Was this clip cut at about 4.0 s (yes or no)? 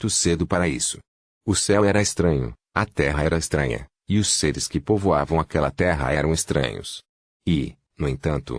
no